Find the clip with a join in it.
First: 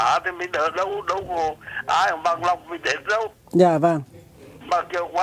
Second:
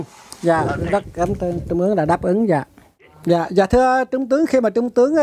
first; 1 cut; at 2.1 s

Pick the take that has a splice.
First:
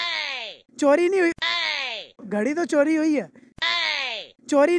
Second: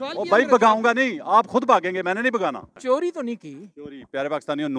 second; 1 cut; at 2.7 s

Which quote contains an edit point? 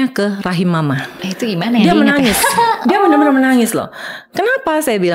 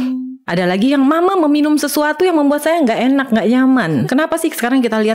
second; 1 cut; at 4.0 s

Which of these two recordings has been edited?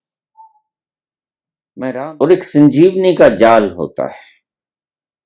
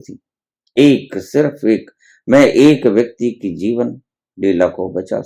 first; 1 cut; at 1.9 s

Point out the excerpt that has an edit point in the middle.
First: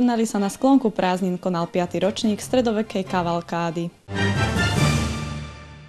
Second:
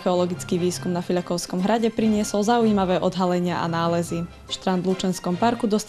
first; 1 cut; at 4.0 s

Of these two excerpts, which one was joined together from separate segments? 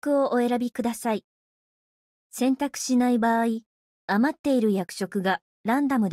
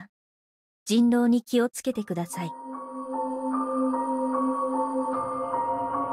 second; 2 cuts; at 2.4 s, 4.4 s

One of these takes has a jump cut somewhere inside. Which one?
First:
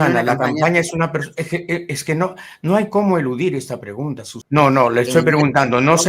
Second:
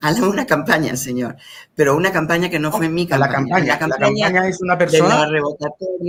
first; 1 cut; at 4.3 s

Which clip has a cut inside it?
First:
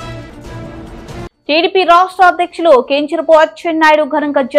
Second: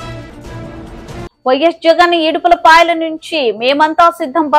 second; 1 cut; at 1.4 s

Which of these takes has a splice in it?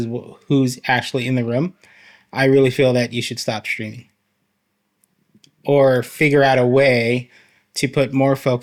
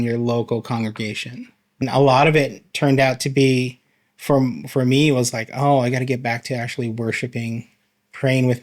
second; 1 cut; at 1.8 s

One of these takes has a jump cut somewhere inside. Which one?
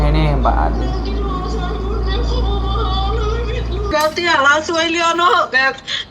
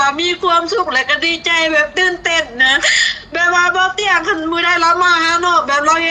first; 1 cut; at 3.9 s

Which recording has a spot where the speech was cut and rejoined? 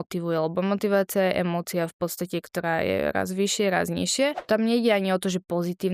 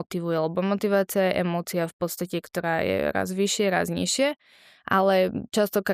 first; 1 cut; at 4.4 s

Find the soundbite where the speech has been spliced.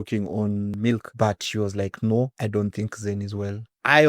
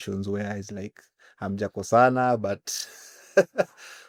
first; 2 cuts; at 1.0 s, 2.3 s

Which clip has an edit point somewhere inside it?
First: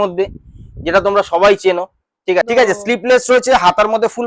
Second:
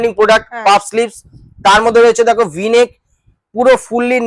first; 1 cut; at 2.4 s

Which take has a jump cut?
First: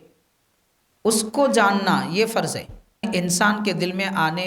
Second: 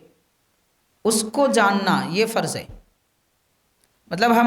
first; 1 cut; at 3.0 s

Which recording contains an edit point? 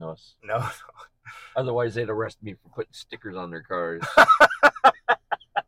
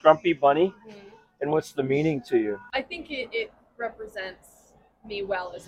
second; 1 cut; at 2.7 s

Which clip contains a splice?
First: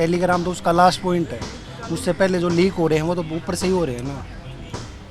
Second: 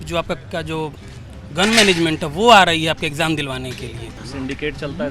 second; 1 cut; at 4.2 s

